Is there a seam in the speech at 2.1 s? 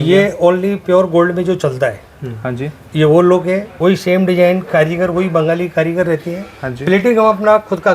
no; 1 cut; at 3.7 s

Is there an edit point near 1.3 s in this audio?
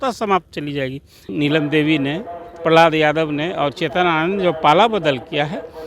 yes; 1 cut; at 1.3 s

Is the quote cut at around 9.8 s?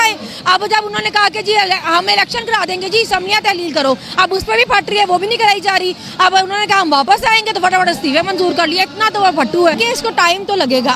yes; 1 cut; at 9.8 s

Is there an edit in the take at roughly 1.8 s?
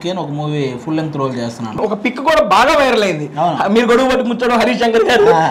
yes; 1 cut; at 1.8 s

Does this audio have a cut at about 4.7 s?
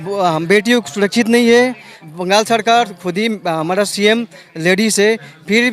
no; 1 cut; at 1.9 s

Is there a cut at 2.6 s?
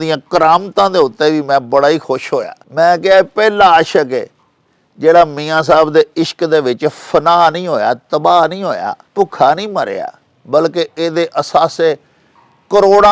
yes; 2 cuts; at 2.6 s, 9.0 s

